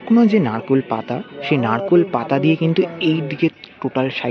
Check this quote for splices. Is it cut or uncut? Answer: uncut